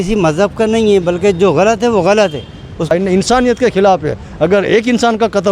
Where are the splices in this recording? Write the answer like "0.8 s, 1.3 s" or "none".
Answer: 2.9 s